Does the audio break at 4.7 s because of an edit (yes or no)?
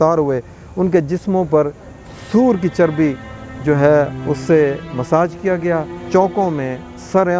no